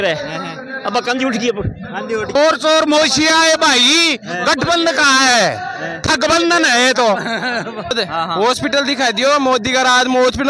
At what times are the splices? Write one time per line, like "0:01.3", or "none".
0:02.3
0:07.9